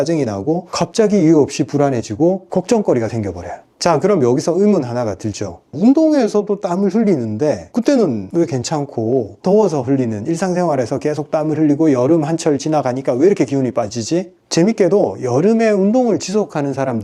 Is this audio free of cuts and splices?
yes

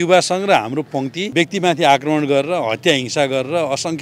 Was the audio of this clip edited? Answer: yes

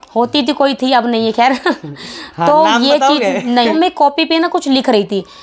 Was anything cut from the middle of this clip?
yes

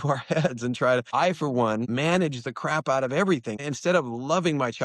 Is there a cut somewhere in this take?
yes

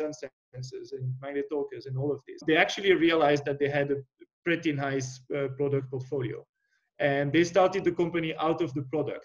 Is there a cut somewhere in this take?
yes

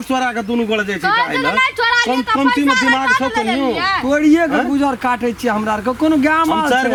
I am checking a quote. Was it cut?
no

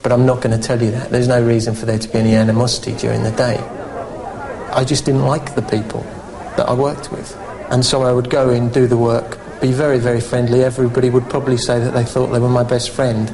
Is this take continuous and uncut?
yes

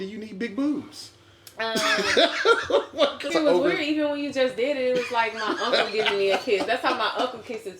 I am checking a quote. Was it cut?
yes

